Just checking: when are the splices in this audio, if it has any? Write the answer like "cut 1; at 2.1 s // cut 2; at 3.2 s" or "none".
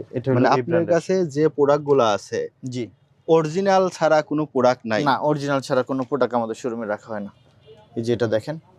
none